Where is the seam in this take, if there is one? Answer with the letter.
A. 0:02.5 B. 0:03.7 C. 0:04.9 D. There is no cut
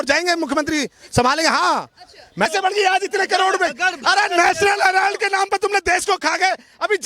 A